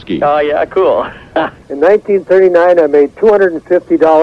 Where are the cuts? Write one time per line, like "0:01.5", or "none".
0:01.6